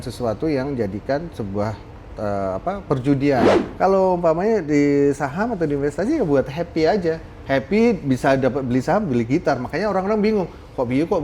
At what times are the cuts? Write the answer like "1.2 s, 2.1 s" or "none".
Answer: 3.5 s